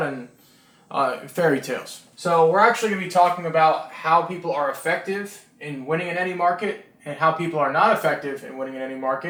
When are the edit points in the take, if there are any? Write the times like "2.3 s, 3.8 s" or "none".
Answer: none